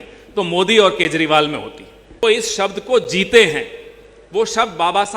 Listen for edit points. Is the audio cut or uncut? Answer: cut